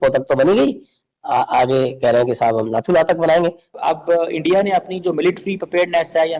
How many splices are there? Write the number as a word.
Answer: one